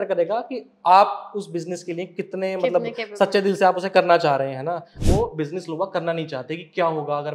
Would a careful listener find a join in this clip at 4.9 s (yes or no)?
yes